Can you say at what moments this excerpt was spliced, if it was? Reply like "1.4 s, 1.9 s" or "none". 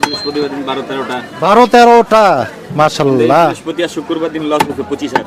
none